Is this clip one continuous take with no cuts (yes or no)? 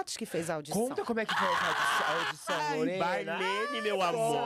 yes